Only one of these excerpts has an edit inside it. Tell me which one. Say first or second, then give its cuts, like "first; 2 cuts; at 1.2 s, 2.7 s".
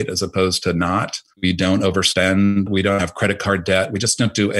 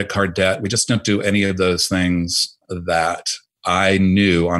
first; 1 cut; at 1.2 s